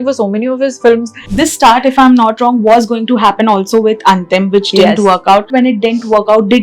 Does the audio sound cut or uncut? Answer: cut